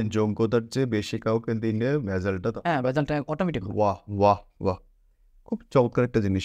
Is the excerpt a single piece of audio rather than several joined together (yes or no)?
yes